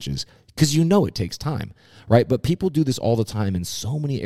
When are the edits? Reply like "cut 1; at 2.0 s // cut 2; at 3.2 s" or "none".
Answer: none

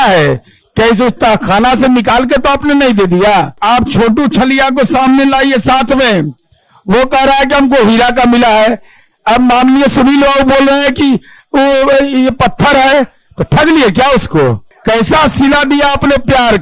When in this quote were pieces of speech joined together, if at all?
cut 1; at 3.6 s // cut 2; at 14.7 s

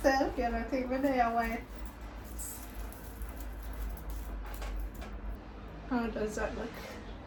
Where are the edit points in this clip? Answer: none

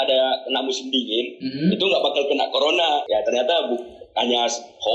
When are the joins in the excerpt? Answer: cut 1; at 3.0 s

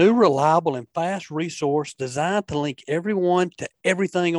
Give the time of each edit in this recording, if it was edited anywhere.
none

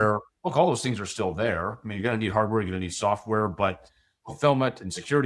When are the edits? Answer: cut 1; at 4.2 s

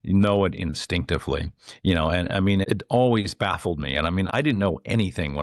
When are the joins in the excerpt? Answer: cut 1; at 2.6 s // cut 2; at 4.3 s

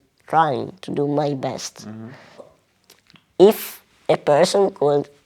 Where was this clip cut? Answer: cut 1; at 2.6 s

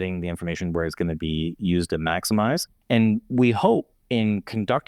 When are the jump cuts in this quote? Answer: cut 1; at 2.7 s // cut 2; at 4.0 s

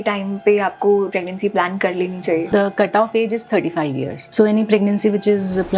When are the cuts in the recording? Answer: cut 1; at 1.1 s // cut 2; at 2.5 s // cut 3; at 4.2 s

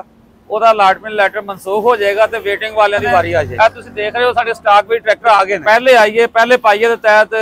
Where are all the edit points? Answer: cut 1; at 3.5 s // cut 2; at 5.6 s

